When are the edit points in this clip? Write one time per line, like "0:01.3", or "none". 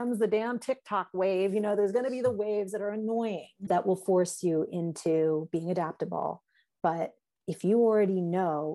0:07.3